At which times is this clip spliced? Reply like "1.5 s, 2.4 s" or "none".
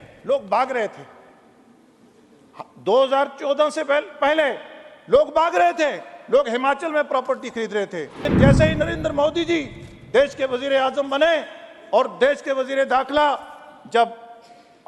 8.3 s